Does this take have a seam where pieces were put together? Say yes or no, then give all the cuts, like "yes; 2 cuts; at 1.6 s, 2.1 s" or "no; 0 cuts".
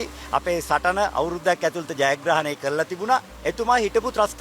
yes; 1 cut; at 3.4 s